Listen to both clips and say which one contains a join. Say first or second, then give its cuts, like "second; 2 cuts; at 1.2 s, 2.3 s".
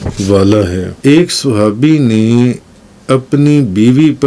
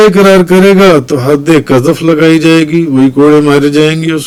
first; 1 cut; at 0.9 s